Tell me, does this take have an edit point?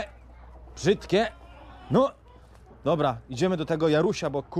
no; 0 cuts

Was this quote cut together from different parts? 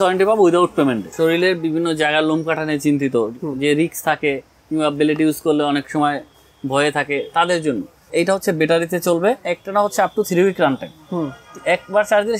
yes; 3 cuts; at 1.1 s, 8.1 s, 9.5 s

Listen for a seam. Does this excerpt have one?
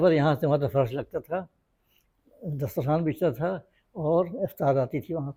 no; 0 cuts

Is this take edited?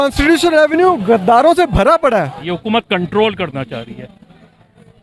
yes; 1 cut; at 2.4 s

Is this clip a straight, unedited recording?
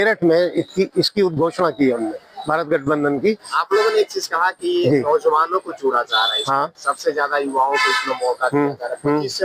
no; 1 cut; at 3.5 s

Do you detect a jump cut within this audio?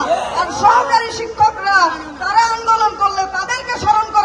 no; 0 cuts

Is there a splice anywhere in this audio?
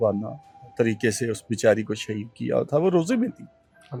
no; 0 cuts

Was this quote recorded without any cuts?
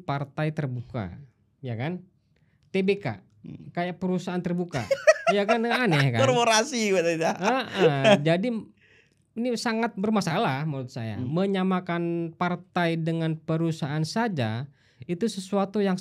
yes; 0 cuts

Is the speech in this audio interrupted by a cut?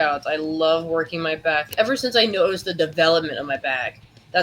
yes; 1 cut; at 1.7 s

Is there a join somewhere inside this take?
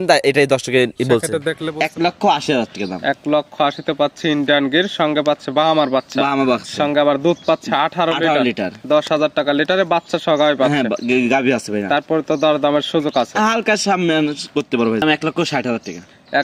yes; 2 cuts; at 1.5 s, 15.0 s

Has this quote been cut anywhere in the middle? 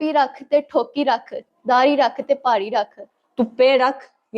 yes; 1 cut; at 3.2 s

